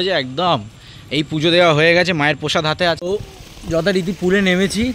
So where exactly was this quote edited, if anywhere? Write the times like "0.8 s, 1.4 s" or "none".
3.0 s